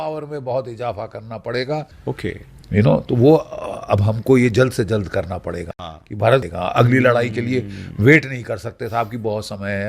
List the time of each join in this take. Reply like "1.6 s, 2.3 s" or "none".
5.9 s